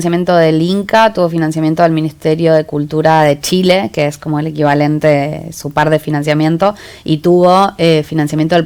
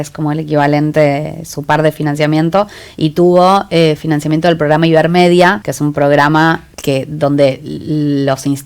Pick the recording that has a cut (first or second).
second